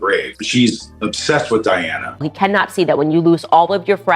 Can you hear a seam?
yes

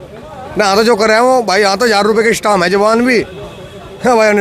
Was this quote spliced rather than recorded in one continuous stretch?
no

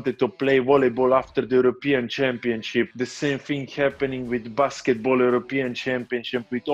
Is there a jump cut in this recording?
yes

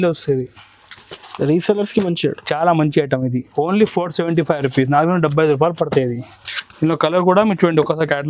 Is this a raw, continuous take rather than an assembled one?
yes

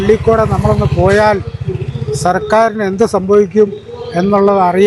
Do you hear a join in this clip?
no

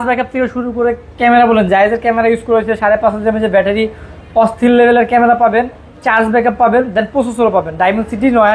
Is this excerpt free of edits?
yes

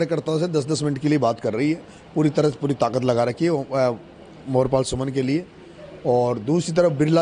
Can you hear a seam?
no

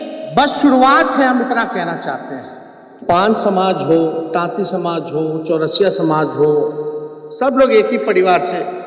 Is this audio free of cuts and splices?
no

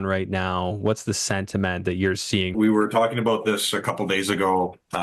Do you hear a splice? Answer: yes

